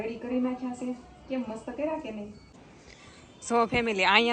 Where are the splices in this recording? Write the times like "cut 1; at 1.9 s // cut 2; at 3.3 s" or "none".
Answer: cut 1; at 2.7 s